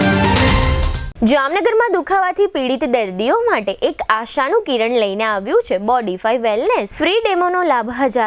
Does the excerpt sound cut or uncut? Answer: cut